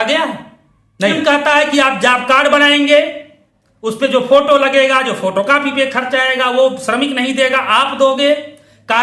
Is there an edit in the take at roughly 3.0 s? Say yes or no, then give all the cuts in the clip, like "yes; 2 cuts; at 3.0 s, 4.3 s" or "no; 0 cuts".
no; 1 cut; at 1.1 s